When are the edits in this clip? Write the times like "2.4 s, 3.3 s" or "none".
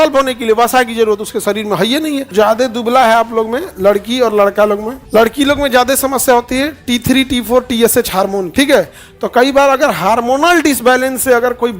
2.3 s, 4.9 s, 8.5 s